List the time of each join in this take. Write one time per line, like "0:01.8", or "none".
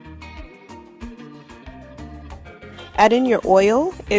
0:02.9